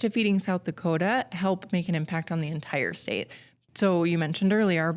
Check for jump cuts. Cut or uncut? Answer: uncut